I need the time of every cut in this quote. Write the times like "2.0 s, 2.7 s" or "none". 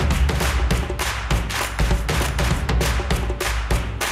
none